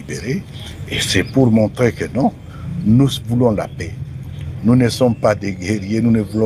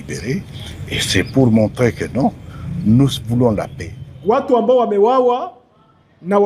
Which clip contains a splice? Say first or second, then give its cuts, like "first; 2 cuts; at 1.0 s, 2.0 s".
second; 1 cut; at 4.4 s